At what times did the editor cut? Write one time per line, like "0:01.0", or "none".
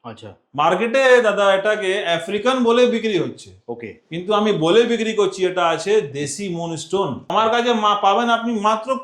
0:07.2